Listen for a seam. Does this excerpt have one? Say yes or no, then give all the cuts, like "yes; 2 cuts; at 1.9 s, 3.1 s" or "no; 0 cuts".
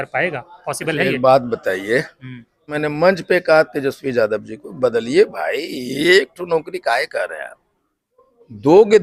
yes; 1 cut; at 2.7 s